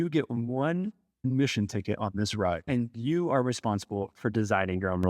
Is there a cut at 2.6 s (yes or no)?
yes